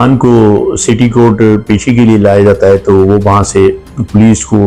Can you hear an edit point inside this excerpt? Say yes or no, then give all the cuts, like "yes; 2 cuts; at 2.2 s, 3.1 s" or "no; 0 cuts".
no; 0 cuts